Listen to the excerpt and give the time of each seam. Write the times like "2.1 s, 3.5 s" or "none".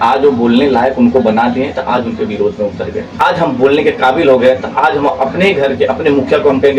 3.2 s

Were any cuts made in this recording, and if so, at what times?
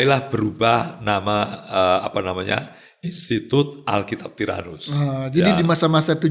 none

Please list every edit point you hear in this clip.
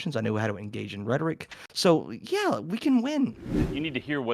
3.4 s

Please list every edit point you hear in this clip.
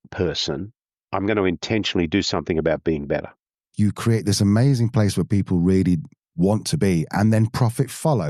3.7 s

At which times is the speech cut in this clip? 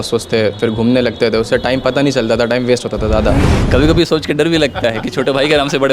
3.5 s

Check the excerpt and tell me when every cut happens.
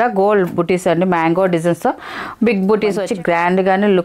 3.0 s

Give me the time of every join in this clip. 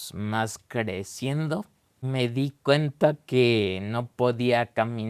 2.0 s

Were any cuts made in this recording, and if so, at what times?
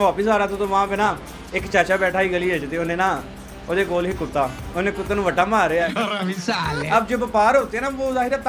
6.5 s

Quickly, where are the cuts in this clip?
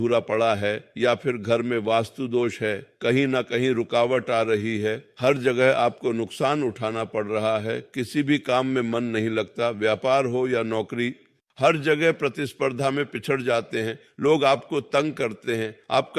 none

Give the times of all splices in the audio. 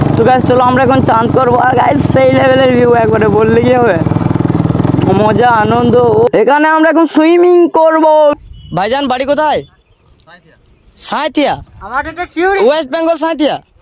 6.3 s, 8.4 s

